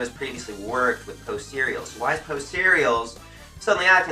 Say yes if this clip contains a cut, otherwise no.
no